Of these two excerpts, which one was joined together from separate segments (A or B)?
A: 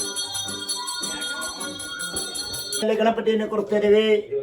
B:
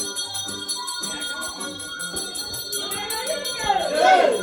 A